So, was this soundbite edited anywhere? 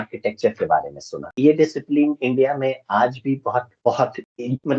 yes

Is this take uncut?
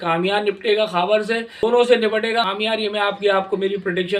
no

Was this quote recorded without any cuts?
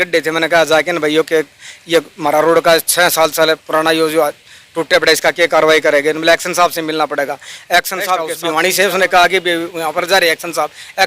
no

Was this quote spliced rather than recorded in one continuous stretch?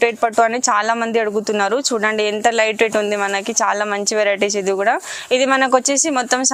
no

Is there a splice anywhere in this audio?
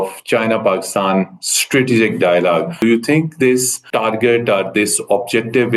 yes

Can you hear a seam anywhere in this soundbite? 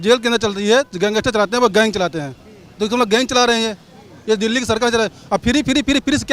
no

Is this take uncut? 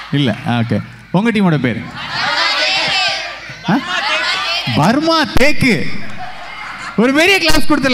yes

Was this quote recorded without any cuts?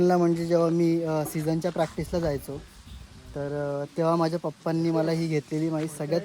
yes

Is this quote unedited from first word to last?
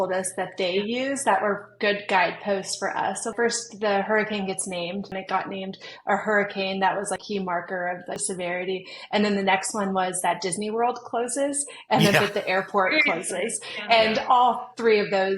no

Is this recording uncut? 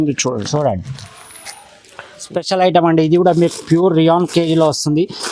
no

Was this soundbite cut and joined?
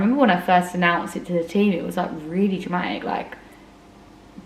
no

